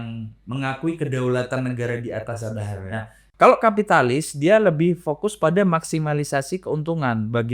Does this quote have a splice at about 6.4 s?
no; 1 cut; at 3.2 s

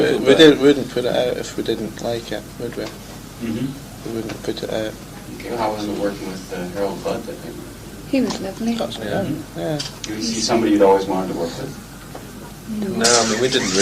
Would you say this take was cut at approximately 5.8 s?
yes; 1 cut; at 5.8 s

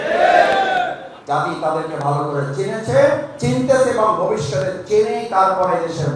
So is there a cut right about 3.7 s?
no; 1 cut; at 1.1 s

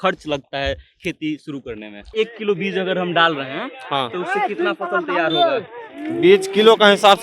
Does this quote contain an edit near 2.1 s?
yes; 1 cut; at 2.1 s

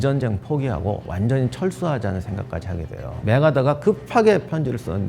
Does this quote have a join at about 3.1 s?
yes; 1 cut; at 3.1 s

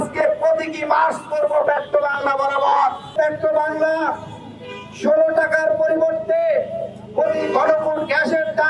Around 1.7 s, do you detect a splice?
no; 1 cut; at 3.2 s

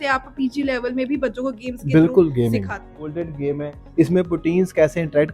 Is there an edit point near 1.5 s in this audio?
no; 1 cut; at 3.0 s

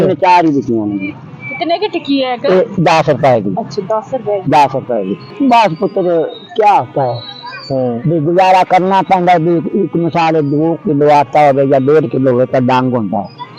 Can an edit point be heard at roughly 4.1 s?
no; 1 cut; at 5.3 s

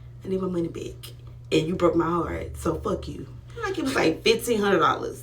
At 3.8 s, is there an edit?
yes; 1 cut; at 3.8 s

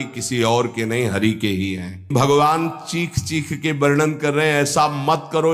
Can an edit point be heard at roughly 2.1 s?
yes; 1 cut; at 2.1 s

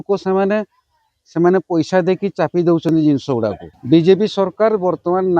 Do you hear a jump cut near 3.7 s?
yes; 1 cut; at 3.7 s

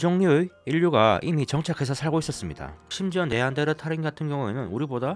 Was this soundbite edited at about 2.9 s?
yes; 1 cut; at 2.9 s

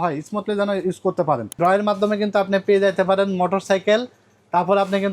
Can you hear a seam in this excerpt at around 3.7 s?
no; 1 cut; at 1.6 s

